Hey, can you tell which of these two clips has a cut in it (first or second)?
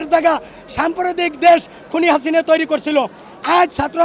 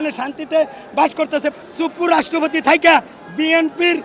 second